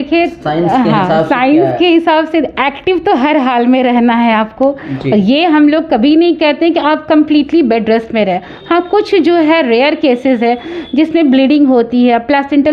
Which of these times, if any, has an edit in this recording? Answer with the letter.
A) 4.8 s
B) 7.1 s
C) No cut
C